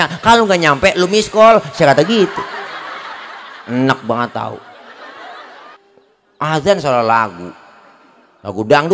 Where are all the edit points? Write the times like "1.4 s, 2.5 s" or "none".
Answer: 5.7 s